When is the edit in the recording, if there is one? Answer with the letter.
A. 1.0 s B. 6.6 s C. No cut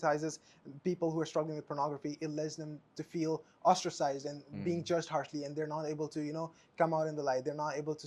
C